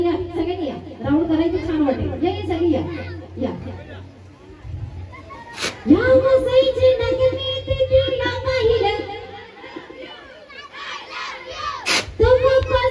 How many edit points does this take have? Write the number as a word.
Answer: zero